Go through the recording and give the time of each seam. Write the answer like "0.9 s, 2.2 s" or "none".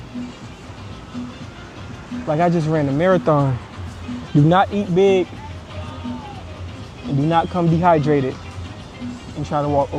none